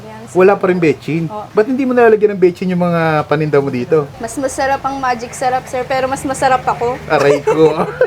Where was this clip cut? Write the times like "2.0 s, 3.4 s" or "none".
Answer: none